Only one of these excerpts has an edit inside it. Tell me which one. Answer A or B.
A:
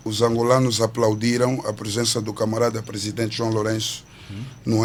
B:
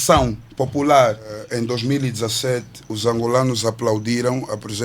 B